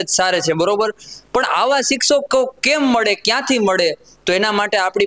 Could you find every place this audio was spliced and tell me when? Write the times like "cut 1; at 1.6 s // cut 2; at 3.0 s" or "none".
none